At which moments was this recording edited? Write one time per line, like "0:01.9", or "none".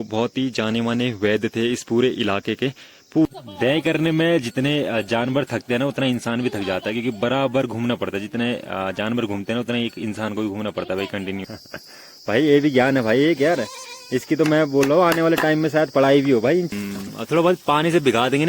0:03.3
0:11.4
0:16.7